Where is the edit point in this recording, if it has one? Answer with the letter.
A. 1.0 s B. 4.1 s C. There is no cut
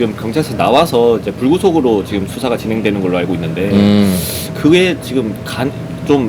C